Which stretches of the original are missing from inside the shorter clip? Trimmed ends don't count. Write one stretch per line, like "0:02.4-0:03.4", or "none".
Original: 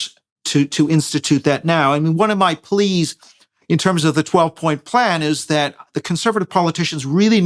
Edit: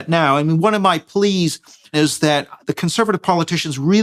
0:03.5-0:05.2